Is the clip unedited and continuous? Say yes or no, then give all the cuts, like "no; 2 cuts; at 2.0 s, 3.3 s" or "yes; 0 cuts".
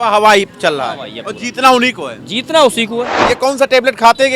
no; 1 cut; at 3.2 s